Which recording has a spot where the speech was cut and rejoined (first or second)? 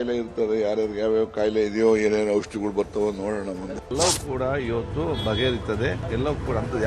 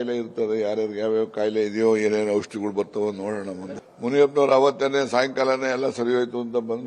first